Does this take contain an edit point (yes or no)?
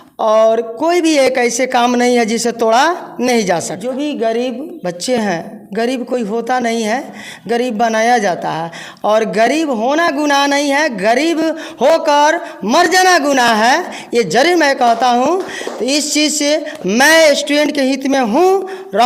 yes